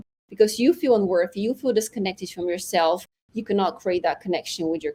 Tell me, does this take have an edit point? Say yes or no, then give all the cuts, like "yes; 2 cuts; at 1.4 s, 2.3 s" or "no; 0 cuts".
no; 0 cuts